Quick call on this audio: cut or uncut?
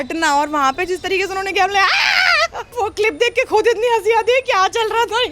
cut